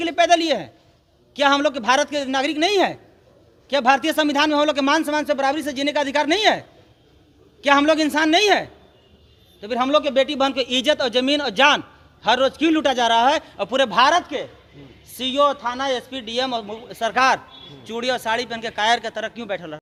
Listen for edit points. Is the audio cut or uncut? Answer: uncut